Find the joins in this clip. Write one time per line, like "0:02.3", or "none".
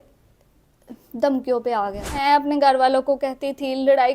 0:02.2